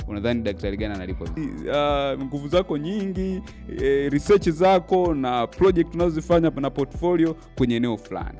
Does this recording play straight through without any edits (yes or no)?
no